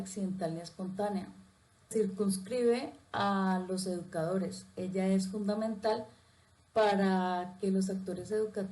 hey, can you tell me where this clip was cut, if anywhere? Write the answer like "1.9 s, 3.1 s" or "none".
1.9 s